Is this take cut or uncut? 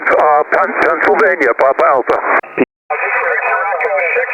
cut